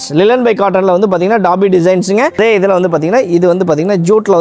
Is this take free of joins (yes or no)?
no